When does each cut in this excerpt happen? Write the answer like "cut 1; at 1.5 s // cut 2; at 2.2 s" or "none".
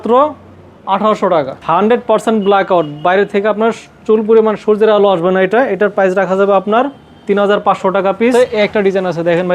cut 1; at 1.6 s // cut 2; at 8.3 s

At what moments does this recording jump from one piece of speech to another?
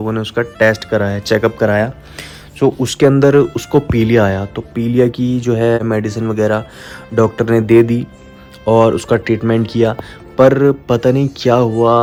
none

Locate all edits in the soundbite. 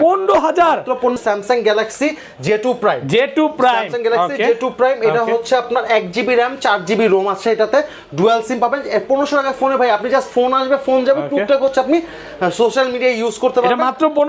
cut 1; at 1.2 s

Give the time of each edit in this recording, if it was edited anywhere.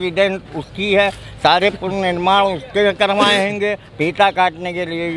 none

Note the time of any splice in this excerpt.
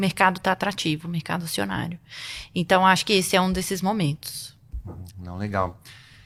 none

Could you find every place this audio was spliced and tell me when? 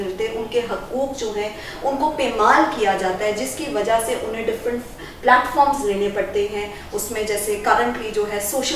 none

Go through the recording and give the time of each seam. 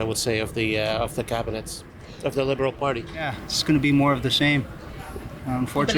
cut 1; at 3.1 s

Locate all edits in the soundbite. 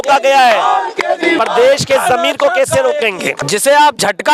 cut 1; at 3.4 s

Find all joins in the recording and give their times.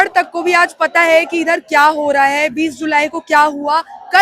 none

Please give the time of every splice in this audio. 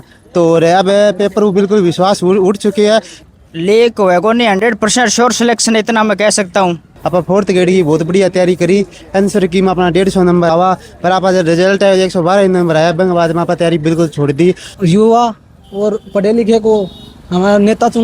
cut 1; at 3.2 s // cut 2; at 6.9 s // cut 3; at 10.5 s // cut 4; at 14.7 s

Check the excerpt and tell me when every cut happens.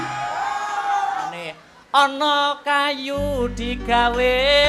cut 1; at 1.3 s

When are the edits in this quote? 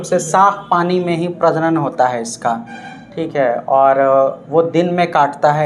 none

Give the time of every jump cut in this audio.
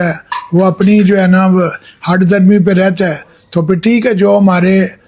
none

